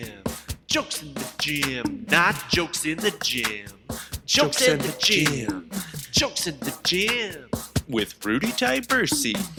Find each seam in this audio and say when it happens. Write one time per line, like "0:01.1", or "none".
none